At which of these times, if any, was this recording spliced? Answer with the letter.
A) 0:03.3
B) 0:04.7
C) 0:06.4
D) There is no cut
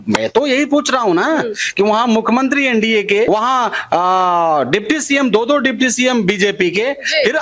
A